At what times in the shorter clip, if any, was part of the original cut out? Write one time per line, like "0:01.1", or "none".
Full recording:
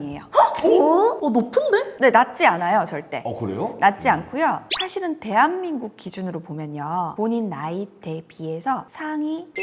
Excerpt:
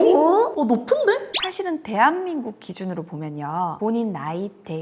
0:01.3